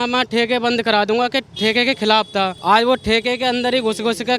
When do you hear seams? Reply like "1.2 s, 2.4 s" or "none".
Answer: 2.6 s

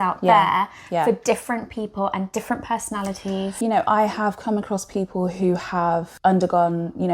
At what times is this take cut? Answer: 3.5 s, 6.1 s

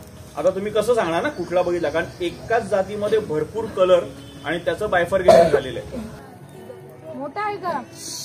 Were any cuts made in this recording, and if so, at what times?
6.1 s

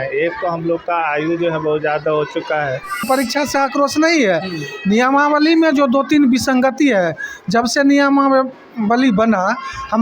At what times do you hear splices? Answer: 3.0 s

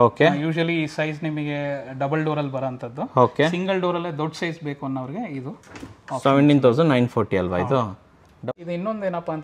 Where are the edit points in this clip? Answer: 8.5 s

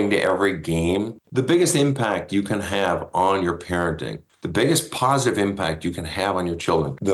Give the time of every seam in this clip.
1.2 s

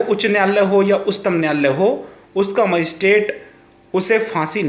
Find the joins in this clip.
none

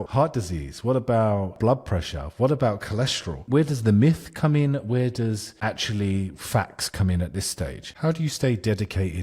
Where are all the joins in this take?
1.5 s, 3.4 s, 7.8 s

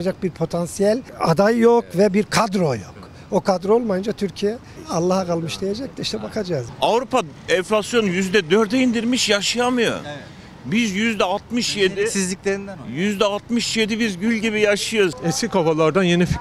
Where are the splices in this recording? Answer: 1.1 s, 4.7 s, 6.7 s, 7.4 s, 15.2 s

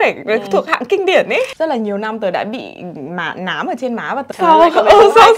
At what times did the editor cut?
1.5 s, 4.3 s

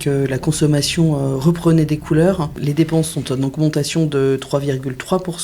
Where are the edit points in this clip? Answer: 2.6 s

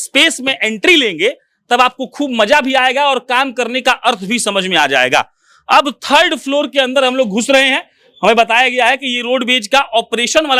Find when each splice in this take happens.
none

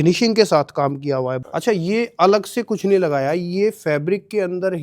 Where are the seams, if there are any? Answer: 1.4 s

